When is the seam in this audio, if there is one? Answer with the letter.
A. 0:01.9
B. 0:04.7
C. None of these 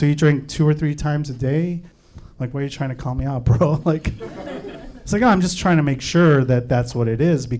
A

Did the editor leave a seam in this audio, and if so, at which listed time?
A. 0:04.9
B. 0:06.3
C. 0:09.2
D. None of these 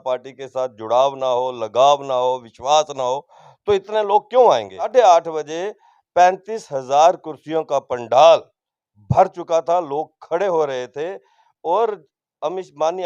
A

